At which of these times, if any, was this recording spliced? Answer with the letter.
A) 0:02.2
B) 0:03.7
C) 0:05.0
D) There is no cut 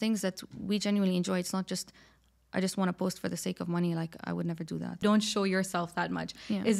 C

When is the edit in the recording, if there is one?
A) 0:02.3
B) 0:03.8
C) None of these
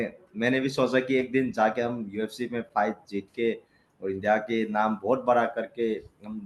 C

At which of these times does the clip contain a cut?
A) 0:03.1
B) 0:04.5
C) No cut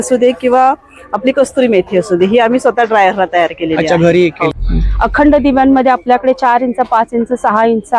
B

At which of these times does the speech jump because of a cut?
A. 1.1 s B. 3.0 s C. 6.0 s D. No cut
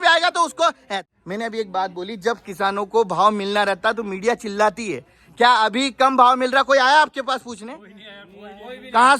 A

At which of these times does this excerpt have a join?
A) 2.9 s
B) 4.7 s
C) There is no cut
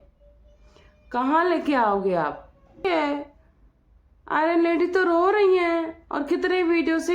A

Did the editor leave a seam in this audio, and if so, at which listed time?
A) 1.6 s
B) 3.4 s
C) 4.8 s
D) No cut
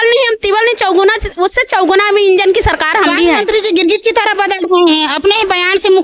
B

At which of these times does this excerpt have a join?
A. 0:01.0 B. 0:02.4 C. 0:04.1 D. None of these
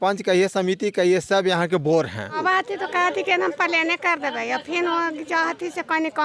B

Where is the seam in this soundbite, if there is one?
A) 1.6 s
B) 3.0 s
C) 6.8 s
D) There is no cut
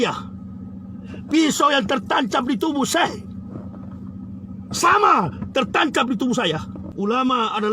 C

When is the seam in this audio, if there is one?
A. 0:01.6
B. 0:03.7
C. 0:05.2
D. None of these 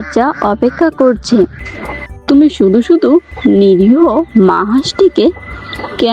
A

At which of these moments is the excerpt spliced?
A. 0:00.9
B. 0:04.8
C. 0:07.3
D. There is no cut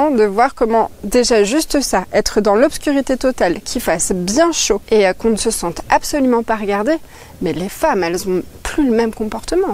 B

